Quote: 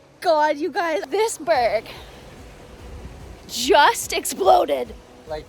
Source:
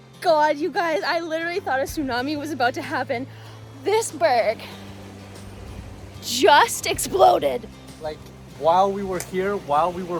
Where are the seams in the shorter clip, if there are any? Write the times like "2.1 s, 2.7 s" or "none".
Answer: 1.1 s